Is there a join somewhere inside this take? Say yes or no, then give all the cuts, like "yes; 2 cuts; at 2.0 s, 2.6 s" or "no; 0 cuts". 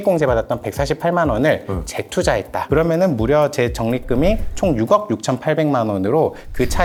no; 0 cuts